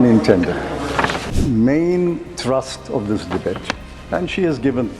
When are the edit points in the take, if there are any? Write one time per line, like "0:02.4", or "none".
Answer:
0:01.3